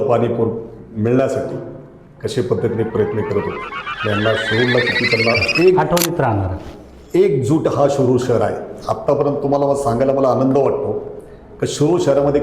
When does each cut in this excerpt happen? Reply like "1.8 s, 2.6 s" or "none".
5.5 s